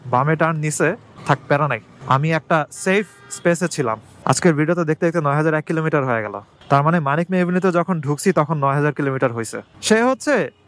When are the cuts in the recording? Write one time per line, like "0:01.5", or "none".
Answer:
0:04.1
0:09.6

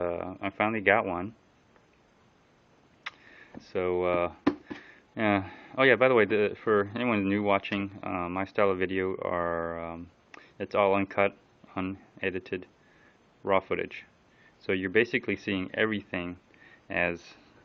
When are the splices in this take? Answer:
0:06.1

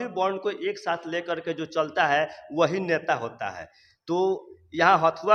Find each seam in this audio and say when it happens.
none

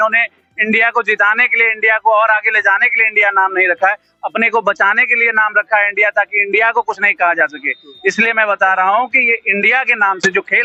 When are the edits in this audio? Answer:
none

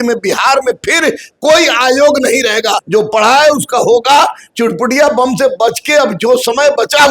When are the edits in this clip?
0:02.8

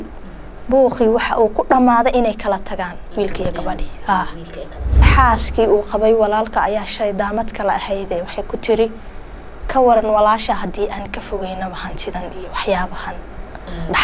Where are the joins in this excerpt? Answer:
0:05.1

